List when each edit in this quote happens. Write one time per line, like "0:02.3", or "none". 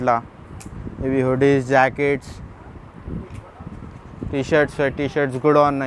none